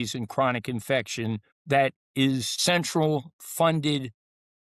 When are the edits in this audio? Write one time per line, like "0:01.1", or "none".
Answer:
0:01.5